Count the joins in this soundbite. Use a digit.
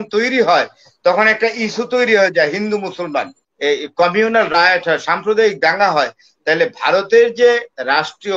1